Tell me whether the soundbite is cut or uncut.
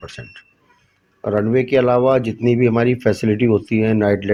uncut